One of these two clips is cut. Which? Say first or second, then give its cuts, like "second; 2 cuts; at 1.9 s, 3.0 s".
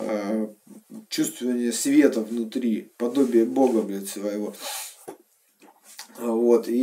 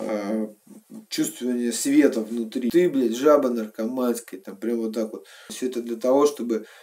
second; 2 cuts; at 2.7 s, 5.5 s